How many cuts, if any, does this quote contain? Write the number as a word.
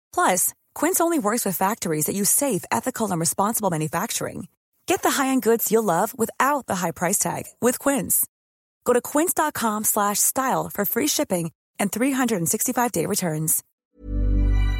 one